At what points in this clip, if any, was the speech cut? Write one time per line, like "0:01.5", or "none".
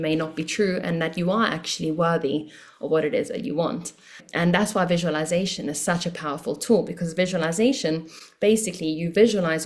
0:04.2